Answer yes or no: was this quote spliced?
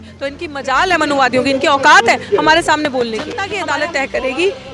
yes